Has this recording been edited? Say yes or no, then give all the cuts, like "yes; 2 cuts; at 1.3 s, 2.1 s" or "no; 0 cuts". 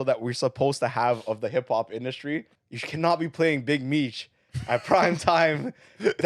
yes; 1 cut; at 2.5 s